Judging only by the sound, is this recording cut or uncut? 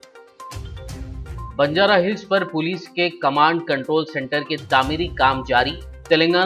cut